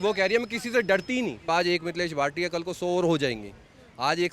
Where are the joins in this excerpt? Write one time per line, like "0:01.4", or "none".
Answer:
0:01.4